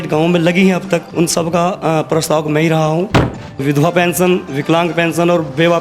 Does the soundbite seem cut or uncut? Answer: cut